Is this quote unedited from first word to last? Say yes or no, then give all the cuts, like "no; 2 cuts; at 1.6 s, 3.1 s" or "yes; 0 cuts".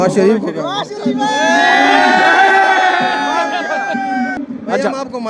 no; 1 cut; at 4.4 s